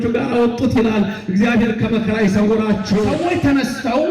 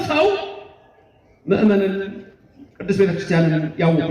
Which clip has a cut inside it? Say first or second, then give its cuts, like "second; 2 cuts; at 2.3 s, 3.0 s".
first; 1 cut; at 3.1 s